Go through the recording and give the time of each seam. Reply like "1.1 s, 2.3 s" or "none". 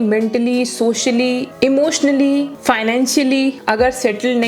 none